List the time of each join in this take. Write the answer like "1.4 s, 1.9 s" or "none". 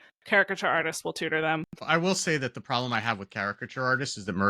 1.8 s